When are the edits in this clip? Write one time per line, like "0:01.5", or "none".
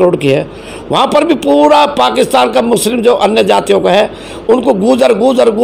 none